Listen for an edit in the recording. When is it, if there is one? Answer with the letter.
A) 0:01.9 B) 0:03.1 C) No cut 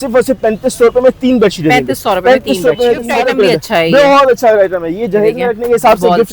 B